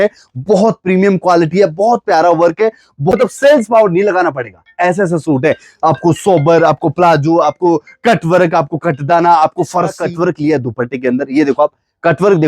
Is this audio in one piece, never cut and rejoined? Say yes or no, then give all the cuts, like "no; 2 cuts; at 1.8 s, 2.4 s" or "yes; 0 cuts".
no; 2 cuts; at 3.1 s, 10.0 s